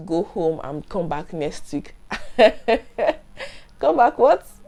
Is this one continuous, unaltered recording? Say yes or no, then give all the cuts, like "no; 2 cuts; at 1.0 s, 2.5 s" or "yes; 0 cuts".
yes; 0 cuts